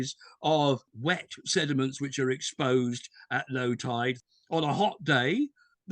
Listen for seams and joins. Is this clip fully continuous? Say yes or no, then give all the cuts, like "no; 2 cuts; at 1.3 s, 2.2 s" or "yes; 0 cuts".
no; 1 cut; at 4.2 s